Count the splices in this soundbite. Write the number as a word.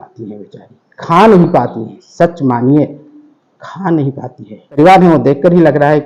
one